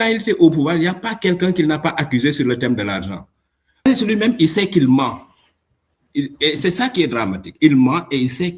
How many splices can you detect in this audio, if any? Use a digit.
1